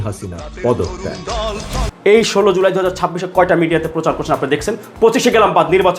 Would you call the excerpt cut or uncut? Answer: cut